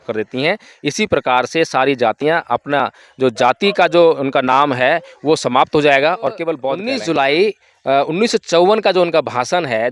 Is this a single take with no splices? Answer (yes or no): no